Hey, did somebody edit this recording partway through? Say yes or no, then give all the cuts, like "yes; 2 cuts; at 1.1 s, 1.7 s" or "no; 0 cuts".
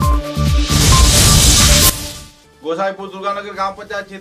yes; 1 cut; at 2.0 s